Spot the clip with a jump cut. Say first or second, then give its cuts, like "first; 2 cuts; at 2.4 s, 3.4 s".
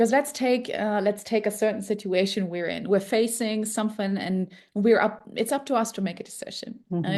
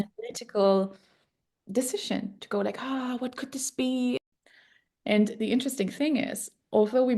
second; 1 cut; at 4.2 s